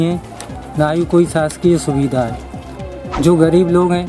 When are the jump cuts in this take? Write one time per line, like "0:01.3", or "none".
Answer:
0:02.8